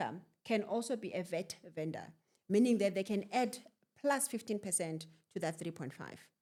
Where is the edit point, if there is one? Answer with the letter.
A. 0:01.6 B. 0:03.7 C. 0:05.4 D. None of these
D